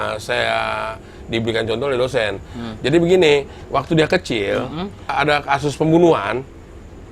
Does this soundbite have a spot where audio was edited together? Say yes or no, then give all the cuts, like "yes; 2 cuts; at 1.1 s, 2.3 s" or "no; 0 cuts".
yes; 1 cut; at 5.1 s